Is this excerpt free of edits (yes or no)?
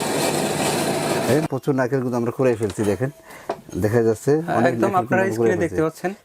no